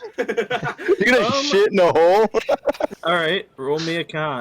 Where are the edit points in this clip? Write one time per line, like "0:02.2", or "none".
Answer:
0:02.9